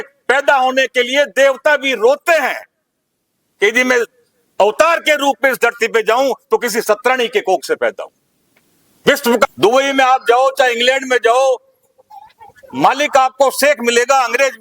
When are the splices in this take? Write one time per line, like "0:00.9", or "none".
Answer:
0:09.4